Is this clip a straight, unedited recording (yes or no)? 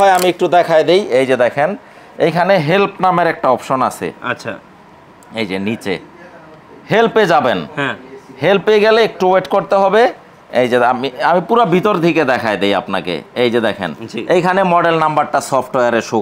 yes